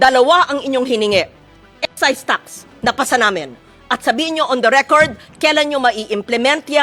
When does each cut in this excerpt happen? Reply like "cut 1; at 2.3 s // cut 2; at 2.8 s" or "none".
none